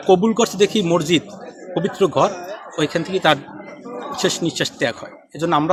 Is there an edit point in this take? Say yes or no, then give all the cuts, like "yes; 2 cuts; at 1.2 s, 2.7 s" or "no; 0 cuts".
no; 0 cuts